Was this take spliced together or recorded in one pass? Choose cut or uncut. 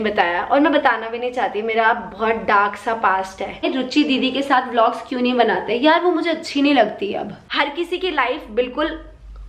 cut